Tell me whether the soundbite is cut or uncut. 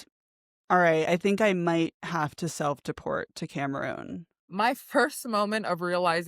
cut